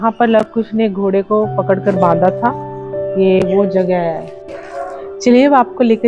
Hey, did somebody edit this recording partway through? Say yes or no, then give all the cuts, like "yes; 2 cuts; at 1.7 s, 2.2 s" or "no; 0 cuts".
yes; 1 cut; at 4.2 s